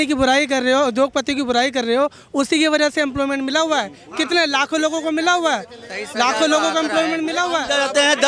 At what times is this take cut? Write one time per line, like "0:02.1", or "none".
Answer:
none